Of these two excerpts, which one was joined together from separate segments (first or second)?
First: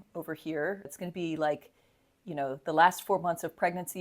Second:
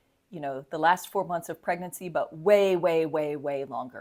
first